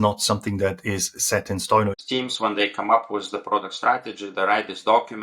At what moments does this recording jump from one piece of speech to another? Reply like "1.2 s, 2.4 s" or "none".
2.0 s